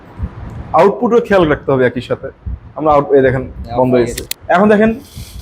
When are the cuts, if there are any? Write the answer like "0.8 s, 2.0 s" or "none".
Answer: 4.2 s